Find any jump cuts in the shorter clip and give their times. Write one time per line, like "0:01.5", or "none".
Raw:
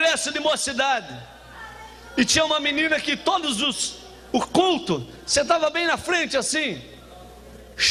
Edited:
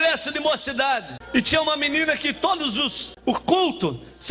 0:01.2
0:03.0